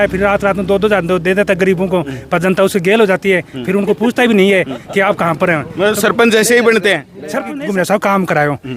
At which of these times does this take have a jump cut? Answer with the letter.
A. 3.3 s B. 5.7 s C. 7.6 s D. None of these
C